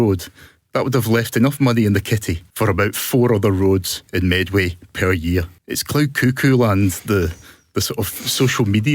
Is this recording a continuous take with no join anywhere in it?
yes; 0 cuts

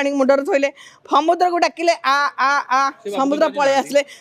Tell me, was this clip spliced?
no; 0 cuts

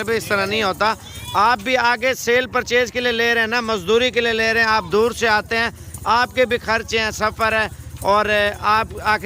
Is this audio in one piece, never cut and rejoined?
yes; 0 cuts

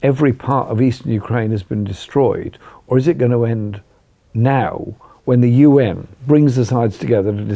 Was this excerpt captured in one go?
no; 1 cut; at 6.1 s

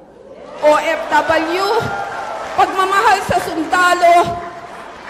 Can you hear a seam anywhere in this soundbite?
no; 0 cuts

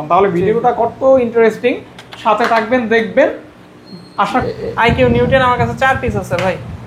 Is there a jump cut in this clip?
yes; 1 cut; at 4.4 s

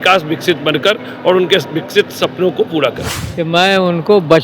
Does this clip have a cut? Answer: no; 0 cuts

